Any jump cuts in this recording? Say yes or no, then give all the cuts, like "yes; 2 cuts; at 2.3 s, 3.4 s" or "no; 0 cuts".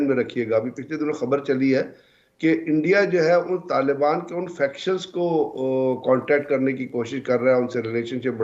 no; 0 cuts